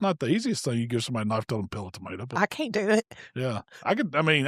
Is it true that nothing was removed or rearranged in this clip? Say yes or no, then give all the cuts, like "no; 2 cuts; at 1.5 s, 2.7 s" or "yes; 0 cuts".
yes; 0 cuts